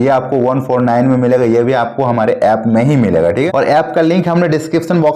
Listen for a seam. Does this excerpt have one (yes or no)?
yes